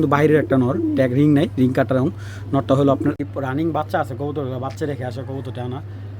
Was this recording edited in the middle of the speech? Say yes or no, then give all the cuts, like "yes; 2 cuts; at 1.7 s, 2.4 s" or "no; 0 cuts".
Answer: yes; 1 cut; at 3.2 s